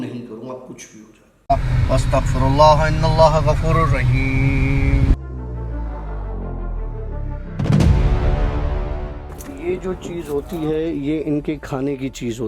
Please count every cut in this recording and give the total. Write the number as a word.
one